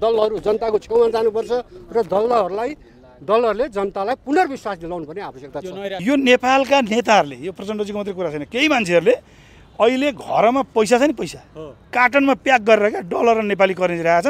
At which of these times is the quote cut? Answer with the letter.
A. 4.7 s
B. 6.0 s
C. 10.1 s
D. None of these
B